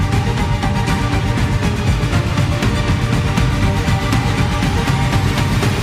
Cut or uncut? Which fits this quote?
uncut